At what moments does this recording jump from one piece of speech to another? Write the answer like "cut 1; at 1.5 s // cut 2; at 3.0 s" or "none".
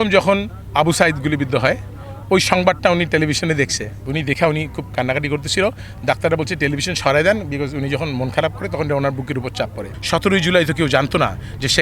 cut 1; at 4.0 s // cut 2; at 9.9 s